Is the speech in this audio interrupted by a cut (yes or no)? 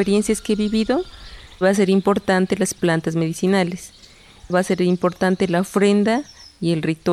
yes